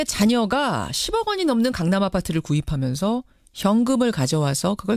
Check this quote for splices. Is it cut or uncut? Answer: uncut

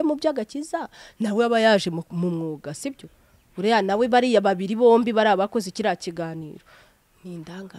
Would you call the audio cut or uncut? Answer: uncut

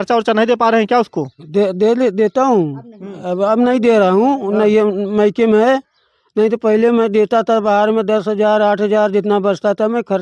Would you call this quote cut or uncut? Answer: uncut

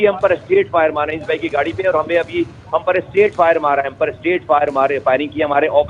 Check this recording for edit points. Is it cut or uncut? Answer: uncut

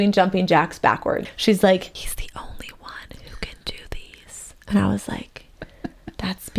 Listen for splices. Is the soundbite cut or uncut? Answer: cut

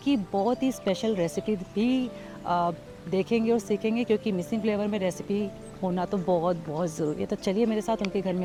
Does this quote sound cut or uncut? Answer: uncut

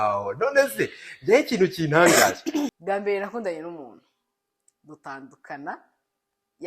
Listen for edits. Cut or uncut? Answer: cut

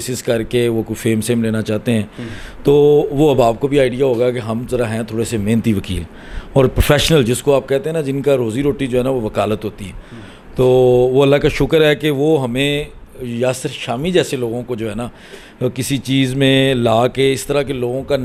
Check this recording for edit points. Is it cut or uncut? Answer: uncut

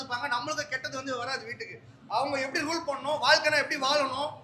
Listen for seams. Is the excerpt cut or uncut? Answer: uncut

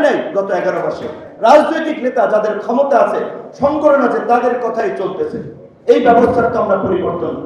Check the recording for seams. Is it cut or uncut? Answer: uncut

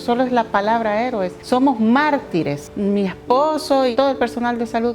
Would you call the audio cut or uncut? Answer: cut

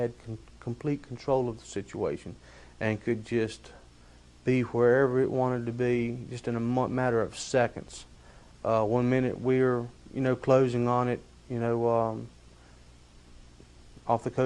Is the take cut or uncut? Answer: uncut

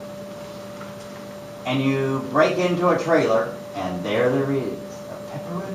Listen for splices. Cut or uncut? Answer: cut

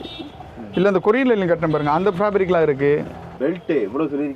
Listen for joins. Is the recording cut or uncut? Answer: cut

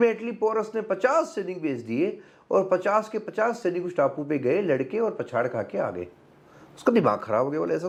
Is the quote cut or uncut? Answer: uncut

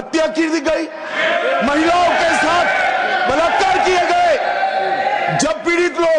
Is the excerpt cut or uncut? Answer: uncut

